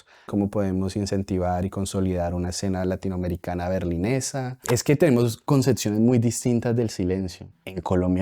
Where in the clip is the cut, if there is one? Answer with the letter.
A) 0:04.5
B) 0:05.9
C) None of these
A